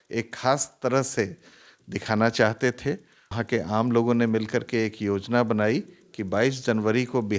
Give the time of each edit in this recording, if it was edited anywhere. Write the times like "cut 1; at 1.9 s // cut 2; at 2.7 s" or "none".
cut 1; at 3.4 s